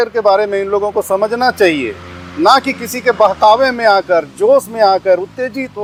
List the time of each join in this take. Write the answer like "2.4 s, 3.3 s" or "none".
none